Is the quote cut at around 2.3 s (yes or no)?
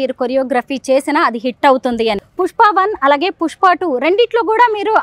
yes